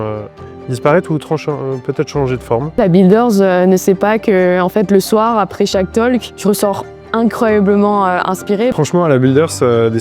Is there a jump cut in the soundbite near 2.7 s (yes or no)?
yes